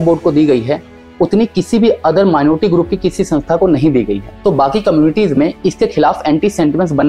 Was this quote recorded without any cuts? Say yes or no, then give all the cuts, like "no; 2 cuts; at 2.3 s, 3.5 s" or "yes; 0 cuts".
yes; 0 cuts